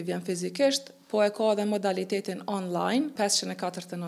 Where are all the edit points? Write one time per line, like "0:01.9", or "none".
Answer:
0:03.1